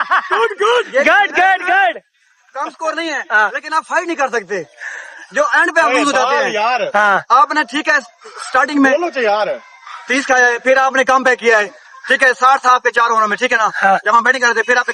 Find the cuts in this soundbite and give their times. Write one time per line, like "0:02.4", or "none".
none

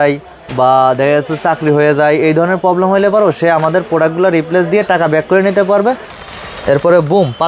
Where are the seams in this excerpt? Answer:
0:06.1

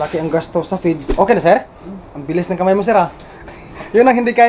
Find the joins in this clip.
0:01.1

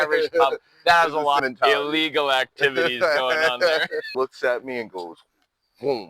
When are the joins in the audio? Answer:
0:01.4
0:04.1

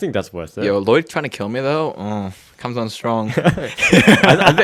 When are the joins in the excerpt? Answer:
none

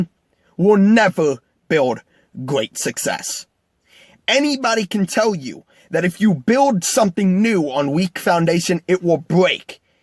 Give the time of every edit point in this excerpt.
0:03.2

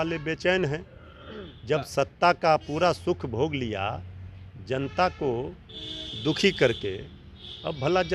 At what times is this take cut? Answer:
none

